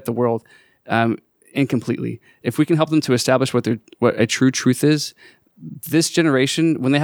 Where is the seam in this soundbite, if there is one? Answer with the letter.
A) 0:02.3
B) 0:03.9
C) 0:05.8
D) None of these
A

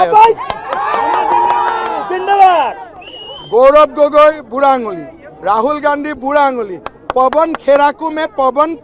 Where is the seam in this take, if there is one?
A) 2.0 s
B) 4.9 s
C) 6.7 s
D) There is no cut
D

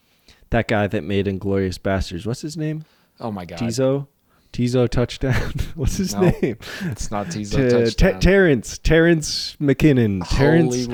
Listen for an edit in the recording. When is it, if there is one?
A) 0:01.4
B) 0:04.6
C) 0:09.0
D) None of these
D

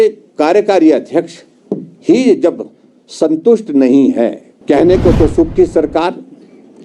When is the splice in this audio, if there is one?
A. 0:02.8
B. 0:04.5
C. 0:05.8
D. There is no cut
B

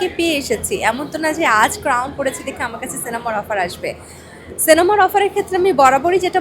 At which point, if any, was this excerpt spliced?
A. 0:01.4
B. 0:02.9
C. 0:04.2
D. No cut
D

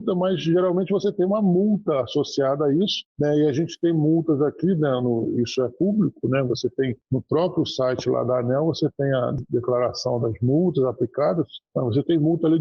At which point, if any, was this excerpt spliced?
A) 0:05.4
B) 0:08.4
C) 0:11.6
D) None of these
C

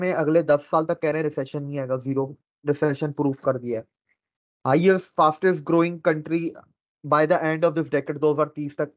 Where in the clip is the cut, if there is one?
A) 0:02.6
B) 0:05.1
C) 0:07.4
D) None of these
D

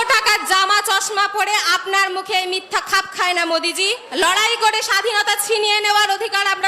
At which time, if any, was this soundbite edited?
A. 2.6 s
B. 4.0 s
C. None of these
B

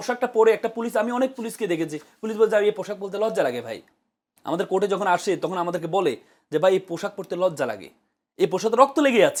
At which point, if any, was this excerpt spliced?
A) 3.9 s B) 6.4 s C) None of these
C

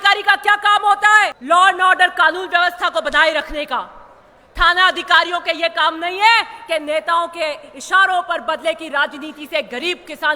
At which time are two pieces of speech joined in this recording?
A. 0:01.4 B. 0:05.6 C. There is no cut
A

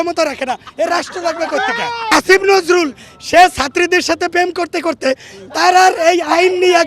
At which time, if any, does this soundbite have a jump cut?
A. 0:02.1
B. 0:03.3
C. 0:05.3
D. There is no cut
A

